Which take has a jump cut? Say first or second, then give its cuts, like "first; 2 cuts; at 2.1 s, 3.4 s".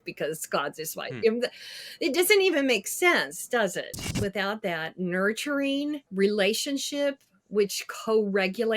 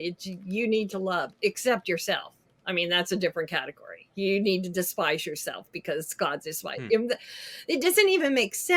first; 2 cuts; at 4.0 s, 6.0 s